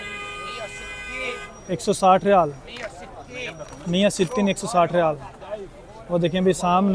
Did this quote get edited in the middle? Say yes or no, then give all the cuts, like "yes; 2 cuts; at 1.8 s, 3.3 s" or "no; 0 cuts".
no; 0 cuts